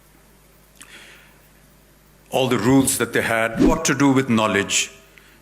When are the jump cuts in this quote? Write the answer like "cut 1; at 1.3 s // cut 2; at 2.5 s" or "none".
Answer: cut 1; at 3.7 s